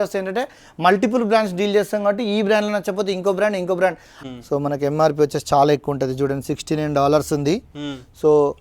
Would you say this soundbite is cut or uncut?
cut